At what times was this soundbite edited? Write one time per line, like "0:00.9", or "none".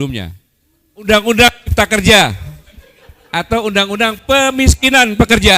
0:01.1